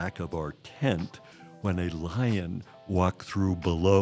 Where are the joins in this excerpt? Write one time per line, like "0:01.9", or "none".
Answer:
none

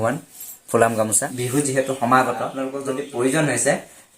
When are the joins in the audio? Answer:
0:01.3
0:02.5

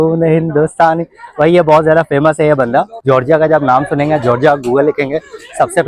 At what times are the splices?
0:02.9

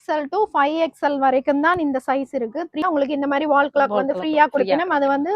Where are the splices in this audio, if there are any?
0:02.8

